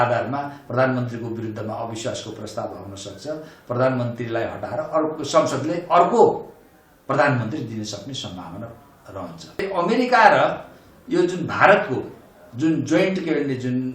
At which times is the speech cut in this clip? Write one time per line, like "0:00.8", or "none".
0:09.7

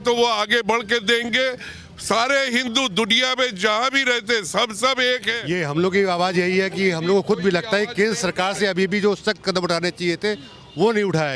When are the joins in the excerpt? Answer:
0:05.3

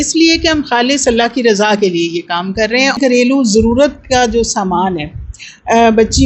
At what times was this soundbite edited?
0:03.0

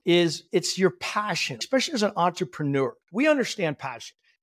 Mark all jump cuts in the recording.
0:01.6
0:03.0

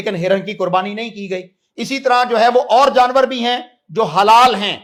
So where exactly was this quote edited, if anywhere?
none

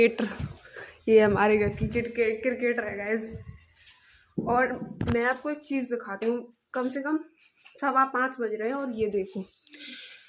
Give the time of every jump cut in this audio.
none

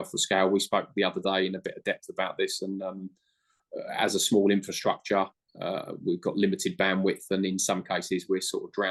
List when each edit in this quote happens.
none

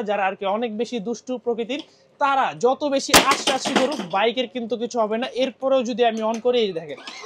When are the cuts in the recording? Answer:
none

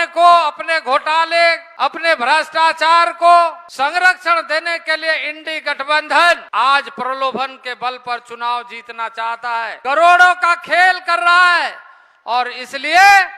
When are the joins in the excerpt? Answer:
0:01.7
0:03.6
0:06.5
0:09.7

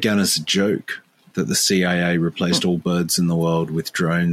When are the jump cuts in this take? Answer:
none

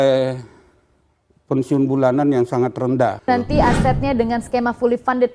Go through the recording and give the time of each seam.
0:03.3

